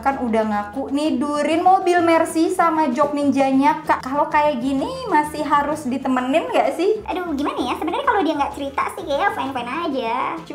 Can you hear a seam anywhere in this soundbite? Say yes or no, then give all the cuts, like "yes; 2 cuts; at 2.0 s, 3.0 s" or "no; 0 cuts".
no; 0 cuts